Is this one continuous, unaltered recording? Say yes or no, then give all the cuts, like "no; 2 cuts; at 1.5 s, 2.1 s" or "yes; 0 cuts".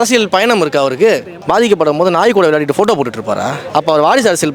no; 2 cuts; at 1.3 s, 3.6 s